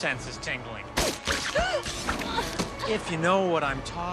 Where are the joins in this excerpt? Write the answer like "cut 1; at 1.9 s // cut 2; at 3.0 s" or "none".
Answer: none